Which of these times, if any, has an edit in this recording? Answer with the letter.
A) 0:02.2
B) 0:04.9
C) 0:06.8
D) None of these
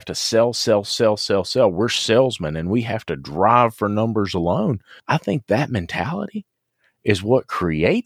B